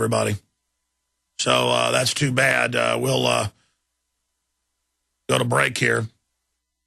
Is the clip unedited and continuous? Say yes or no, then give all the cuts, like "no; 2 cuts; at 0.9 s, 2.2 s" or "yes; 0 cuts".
no; 1 cut; at 4.7 s